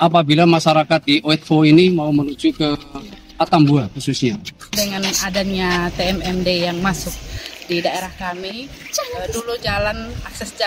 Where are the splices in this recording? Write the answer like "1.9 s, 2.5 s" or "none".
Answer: 4.8 s